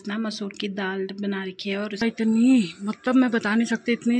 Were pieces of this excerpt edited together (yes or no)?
yes